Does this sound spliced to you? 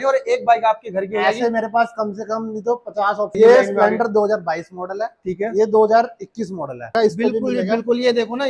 yes; 2 cuts; at 3.3 s, 6.9 s

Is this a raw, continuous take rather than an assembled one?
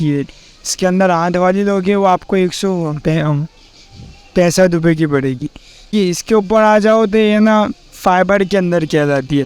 no; 1 cut; at 5.9 s

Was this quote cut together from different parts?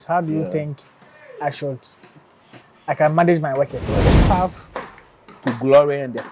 yes; 1 cut; at 4.0 s

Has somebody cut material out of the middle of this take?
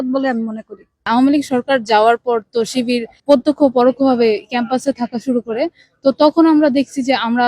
yes; 1 cut; at 1.1 s

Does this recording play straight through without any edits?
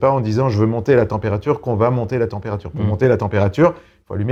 yes; 0 cuts

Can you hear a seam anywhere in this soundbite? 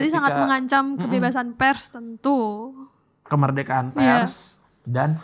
no; 0 cuts

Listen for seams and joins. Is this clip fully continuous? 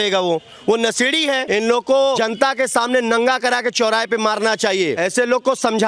no; 2 cuts; at 1.4 s, 2.2 s

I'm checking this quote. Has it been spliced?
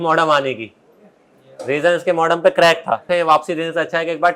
yes; 1 cut; at 3.1 s

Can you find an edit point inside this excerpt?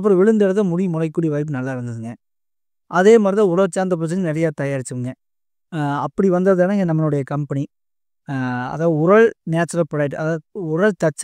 no; 0 cuts

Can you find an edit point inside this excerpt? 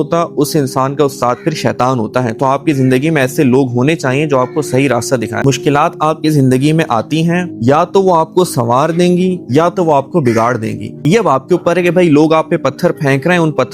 yes; 3 cuts; at 5.4 s, 7.5 s, 10.9 s

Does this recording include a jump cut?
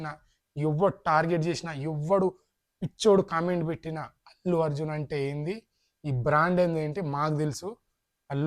no; 0 cuts

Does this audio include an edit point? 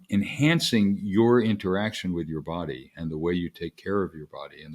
no; 0 cuts

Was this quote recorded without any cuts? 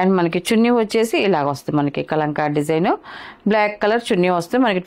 yes; 0 cuts

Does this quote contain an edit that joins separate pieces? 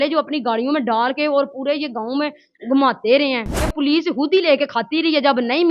yes; 1 cut; at 3.7 s

